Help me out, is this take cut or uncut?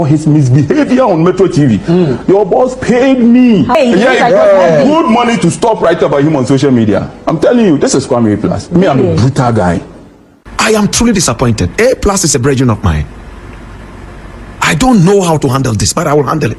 cut